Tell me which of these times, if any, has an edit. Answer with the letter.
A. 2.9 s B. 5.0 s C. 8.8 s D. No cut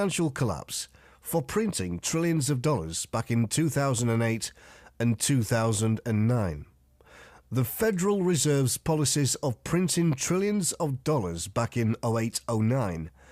A